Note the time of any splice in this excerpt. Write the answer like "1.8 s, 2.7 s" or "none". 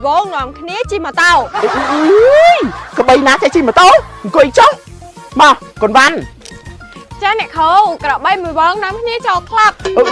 none